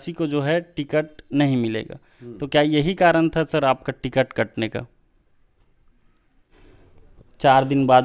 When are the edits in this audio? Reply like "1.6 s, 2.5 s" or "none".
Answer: 6.5 s